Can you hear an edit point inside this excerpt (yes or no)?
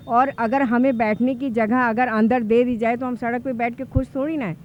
no